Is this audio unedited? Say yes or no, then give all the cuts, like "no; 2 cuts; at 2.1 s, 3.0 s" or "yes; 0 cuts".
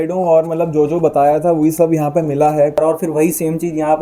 no; 1 cut; at 2.8 s